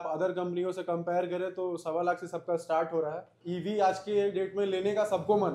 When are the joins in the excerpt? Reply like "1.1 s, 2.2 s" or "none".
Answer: 3.3 s